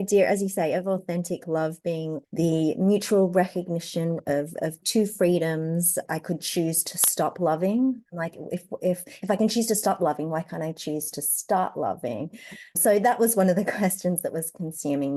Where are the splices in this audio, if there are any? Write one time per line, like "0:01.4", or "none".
0:02.2
0:06.1
0:08.1